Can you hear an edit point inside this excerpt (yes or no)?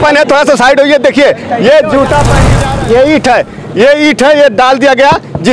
yes